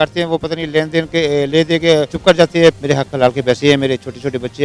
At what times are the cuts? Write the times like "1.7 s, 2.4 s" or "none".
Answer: 2.1 s, 2.8 s